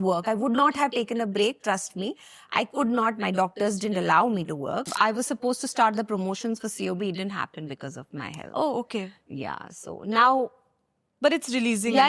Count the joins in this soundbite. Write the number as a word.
one